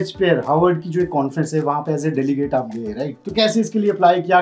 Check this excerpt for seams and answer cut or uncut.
cut